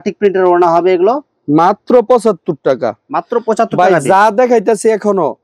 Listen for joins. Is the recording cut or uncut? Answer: uncut